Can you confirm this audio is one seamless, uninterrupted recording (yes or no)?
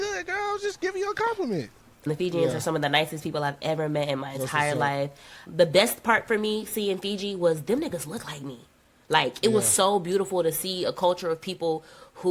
no